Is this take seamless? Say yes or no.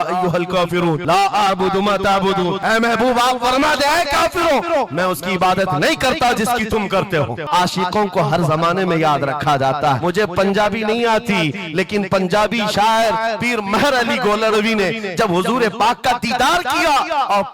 no